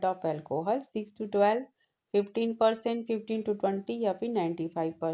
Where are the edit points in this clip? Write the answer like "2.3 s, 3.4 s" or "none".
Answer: none